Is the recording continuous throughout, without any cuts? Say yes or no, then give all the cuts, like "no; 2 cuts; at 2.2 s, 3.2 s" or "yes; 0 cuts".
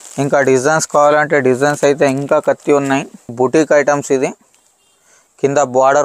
no; 1 cut; at 3.3 s